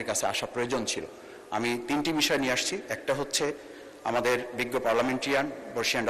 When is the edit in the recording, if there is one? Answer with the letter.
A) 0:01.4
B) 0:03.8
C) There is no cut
C